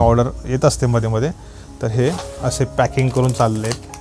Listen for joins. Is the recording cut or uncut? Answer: uncut